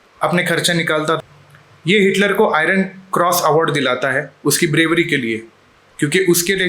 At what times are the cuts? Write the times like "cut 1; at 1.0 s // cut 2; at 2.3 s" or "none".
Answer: cut 1; at 1.2 s